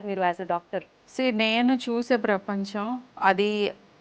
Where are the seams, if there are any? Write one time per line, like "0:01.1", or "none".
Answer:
0:01.0
0:03.1

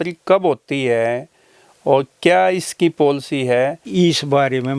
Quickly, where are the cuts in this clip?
0:03.9

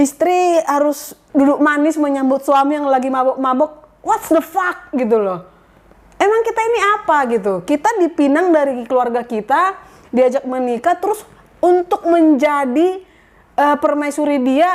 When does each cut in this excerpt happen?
none

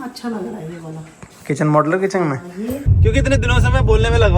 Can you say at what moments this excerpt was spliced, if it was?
0:02.9

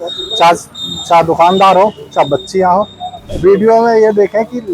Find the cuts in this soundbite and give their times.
0:03.2

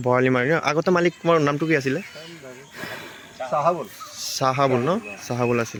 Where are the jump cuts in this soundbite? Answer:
none

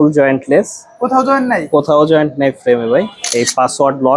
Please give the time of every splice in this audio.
0:03.2

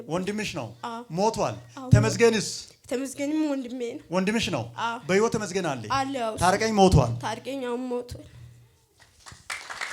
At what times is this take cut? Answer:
none

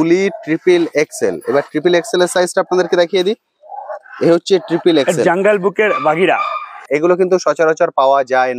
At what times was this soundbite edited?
0:06.8

